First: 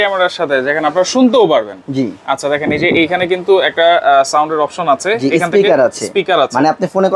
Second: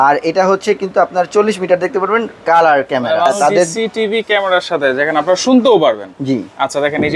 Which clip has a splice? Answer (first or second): second